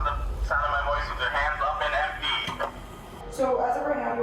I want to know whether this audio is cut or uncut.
cut